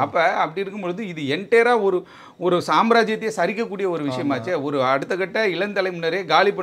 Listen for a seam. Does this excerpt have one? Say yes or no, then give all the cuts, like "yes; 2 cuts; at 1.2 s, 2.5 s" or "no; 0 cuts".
no; 0 cuts